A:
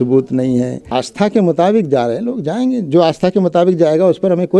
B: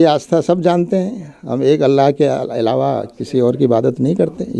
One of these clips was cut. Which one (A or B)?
A